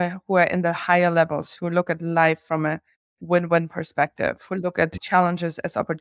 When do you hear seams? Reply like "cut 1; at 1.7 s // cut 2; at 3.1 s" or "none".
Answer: none